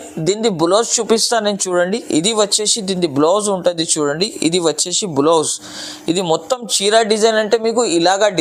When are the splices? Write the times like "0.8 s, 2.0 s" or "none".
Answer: none